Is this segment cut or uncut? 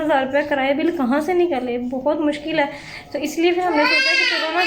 uncut